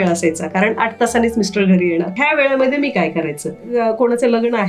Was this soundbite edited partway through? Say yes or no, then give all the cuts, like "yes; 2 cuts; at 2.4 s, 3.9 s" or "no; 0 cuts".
yes; 2 cuts; at 2.2 s, 3.6 s